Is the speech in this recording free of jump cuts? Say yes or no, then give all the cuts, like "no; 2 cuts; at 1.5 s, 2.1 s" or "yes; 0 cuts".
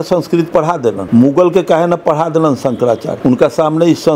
no; 2 cuts; at 1.0 s, 3.1 s